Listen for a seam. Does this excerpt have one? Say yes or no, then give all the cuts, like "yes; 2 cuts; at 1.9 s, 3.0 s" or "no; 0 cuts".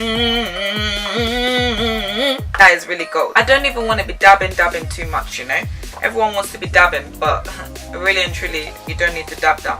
yes; 1 cut; at 3.3 s